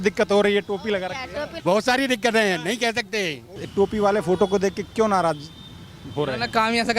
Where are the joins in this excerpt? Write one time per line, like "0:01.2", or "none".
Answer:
0:01.5
0:03.6